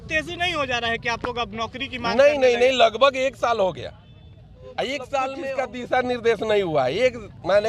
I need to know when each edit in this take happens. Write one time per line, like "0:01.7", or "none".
0:05.4